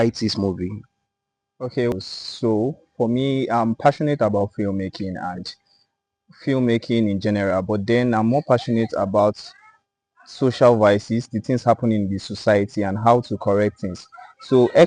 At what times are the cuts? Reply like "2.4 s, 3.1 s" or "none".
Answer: 1.9 s